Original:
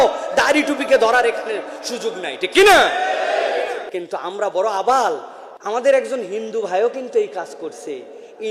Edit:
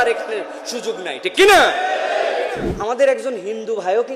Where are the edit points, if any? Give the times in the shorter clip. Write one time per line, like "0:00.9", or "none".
0:03.0

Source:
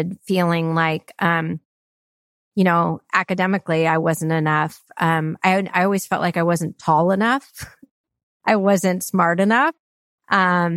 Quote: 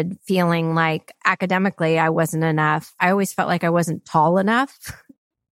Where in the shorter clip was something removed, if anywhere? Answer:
0:01.1
0:03.0

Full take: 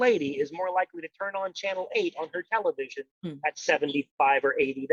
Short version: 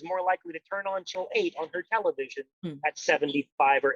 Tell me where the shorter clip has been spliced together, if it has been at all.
0:01.1

